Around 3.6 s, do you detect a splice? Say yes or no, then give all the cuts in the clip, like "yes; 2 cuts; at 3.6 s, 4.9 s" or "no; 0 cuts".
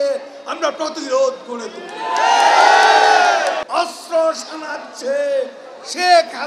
yes; 1 cut; at 3.6 s